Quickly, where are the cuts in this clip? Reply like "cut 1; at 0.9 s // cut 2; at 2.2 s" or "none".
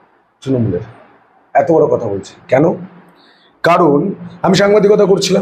none